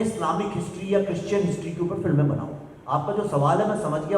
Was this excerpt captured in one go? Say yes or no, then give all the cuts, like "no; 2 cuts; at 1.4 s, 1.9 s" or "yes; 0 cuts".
yes; 0 cuts